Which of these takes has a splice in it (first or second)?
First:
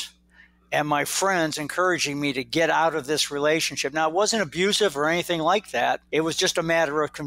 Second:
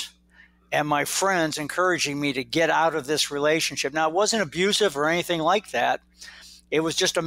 first